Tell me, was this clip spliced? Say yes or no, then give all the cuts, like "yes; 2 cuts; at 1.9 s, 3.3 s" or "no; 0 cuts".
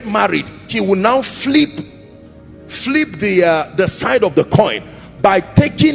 no; 0 cuts